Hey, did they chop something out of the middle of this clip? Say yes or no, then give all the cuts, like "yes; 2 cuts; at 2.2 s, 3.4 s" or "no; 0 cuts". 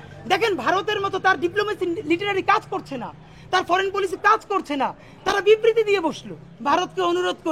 yes; 1 cut; at 6.5 s